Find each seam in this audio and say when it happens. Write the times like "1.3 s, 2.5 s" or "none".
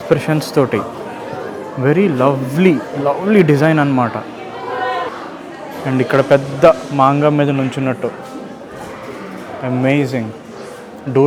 none